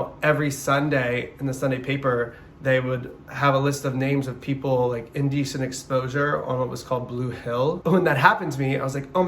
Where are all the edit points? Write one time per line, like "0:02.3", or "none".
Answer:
0:07.8